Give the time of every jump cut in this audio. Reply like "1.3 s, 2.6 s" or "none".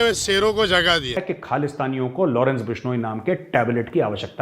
1.1 s